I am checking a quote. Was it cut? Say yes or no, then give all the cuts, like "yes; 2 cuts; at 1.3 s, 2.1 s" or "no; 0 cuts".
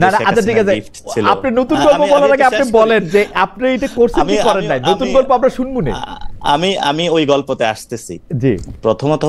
no; 0 cuts